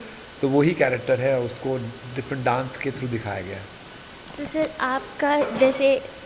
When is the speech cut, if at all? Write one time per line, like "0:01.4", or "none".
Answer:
none

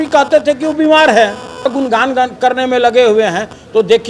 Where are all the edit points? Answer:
0:01.7

